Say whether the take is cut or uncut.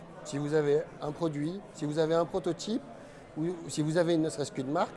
uncut